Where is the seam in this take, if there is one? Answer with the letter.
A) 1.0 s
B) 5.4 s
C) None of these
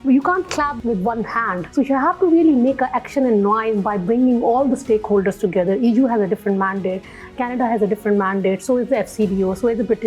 A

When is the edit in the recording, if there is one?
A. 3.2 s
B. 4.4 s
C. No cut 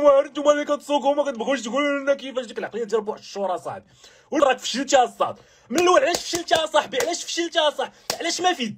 B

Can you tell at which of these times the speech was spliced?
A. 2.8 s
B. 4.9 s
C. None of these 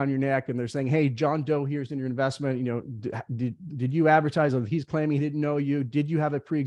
C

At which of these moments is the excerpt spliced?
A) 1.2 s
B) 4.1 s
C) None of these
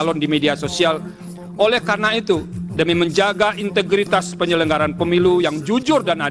A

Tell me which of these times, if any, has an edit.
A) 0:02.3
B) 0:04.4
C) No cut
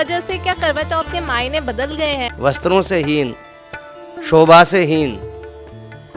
A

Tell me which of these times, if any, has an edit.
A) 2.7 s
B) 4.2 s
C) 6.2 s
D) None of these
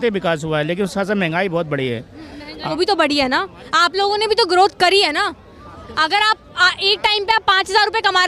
A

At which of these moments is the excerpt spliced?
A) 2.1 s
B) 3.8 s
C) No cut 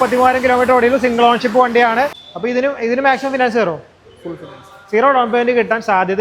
A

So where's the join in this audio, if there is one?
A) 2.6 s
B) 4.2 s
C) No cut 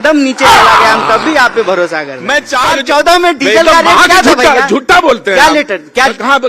A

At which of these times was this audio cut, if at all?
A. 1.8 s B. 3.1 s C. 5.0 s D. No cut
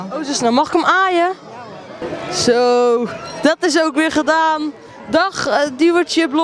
D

